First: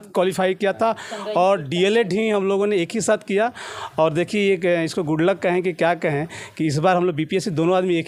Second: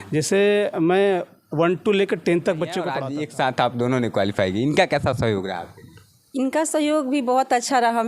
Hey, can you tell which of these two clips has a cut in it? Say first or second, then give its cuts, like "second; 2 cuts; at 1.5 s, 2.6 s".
second; 1 cut; at 2.9 s